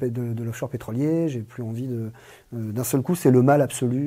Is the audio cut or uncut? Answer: uncut